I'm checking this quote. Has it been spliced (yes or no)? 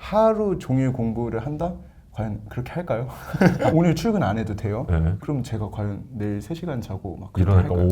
yes